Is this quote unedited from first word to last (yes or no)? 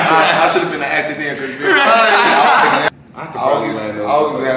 no